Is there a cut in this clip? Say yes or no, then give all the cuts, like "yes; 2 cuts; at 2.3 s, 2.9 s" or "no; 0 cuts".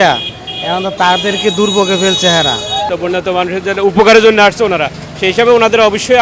yes; 1 cut; at 2.9 s